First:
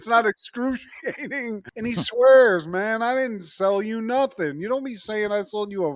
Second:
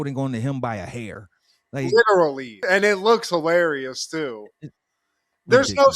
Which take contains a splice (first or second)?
first